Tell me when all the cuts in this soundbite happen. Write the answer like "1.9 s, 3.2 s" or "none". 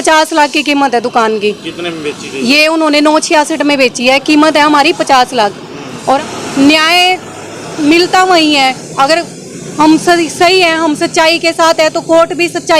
6.2 s